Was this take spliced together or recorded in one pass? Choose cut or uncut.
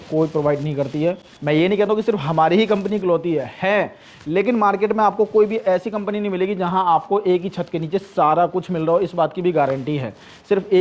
uncut